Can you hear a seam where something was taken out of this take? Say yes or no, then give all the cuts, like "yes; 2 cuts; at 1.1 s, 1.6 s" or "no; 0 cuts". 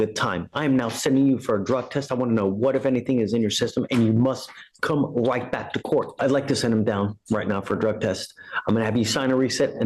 yes; 1 cut; at 6.1 s